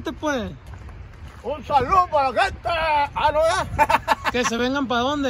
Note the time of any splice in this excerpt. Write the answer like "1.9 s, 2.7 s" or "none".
none